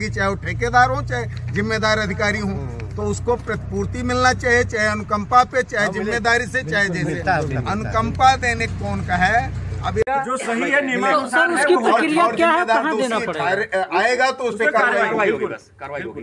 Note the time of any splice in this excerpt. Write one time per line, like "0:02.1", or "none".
0:10.0